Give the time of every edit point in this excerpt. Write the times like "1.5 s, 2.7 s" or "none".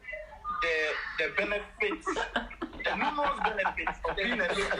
none